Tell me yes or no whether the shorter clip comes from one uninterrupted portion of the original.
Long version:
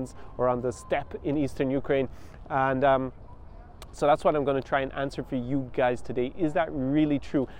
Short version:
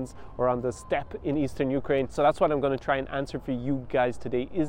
no